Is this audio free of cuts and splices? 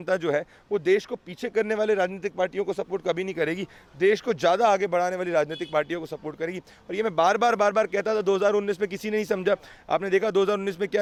yes; 0 cuts

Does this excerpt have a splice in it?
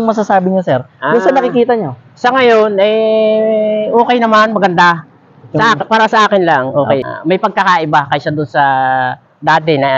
yes; 1 cut; at 7.0 s

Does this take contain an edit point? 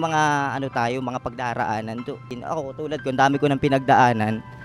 yes; 1 cut; at 2.3 s

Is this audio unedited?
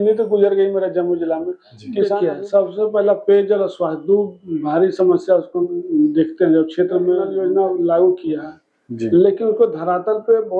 no; 2 cuts; at 2.1 s, 7.3 s

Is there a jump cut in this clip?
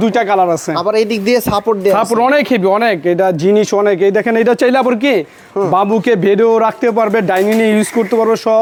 no; 0 cuts

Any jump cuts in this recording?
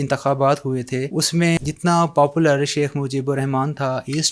yes; 1 cut; at 1.5 s

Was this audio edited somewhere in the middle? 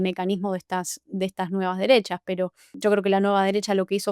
yes; 1 cut; at 2.6 s

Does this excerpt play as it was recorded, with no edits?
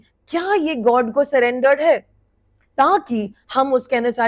yes; 0 cuts

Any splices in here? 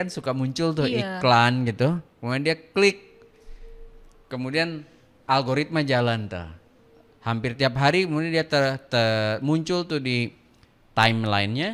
no; 0 cuts

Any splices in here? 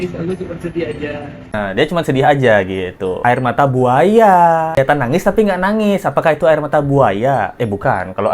yes; 2 cuts; at 1.2 s, 3.2 s

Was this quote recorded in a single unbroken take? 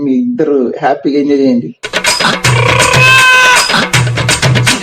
no; 2 cuts; at 1.8 s, 3.3 s

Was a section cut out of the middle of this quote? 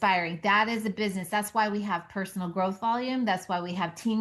no; 0 cuts

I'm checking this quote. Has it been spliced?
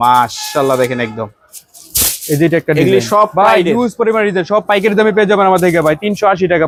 no; 0 cuts

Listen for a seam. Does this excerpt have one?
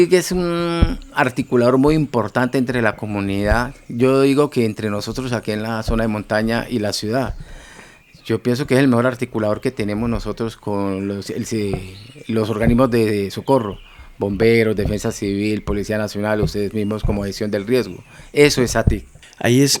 no; 0 cuts

